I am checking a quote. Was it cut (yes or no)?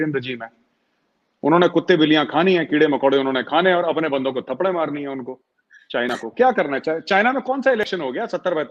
no